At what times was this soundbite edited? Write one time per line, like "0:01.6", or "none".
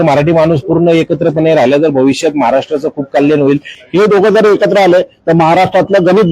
0:03.7